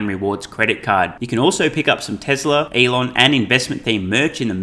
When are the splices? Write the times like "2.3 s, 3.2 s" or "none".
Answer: 2.7 s